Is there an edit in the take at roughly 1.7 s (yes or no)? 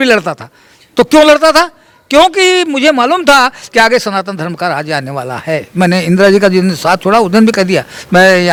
no